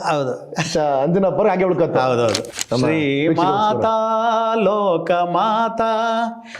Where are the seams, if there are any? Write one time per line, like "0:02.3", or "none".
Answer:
0:02.5